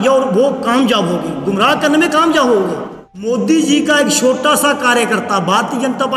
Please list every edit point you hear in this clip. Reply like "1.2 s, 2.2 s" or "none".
3.1 s